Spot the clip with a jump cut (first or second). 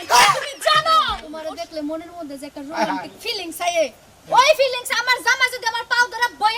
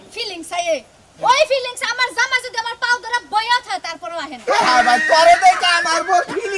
first